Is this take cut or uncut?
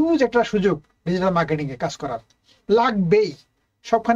uncut